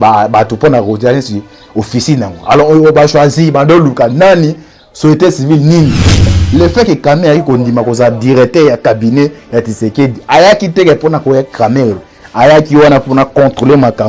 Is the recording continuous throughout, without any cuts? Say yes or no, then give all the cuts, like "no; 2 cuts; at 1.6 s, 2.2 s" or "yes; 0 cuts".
no; 1 cut; at 6.4 s